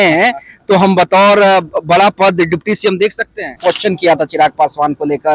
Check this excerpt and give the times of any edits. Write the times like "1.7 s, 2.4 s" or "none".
3.5 s